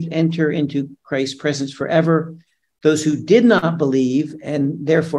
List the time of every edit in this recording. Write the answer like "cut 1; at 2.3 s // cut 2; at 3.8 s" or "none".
none